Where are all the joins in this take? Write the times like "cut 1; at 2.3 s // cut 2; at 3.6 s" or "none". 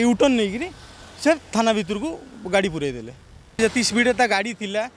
cut 1; at 3.6 s

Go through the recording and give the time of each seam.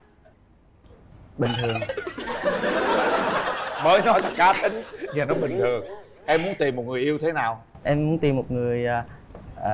none

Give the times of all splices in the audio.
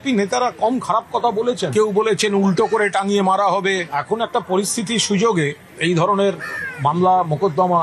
cut 1; at 6.9 s

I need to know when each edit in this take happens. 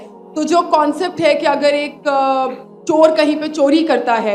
none

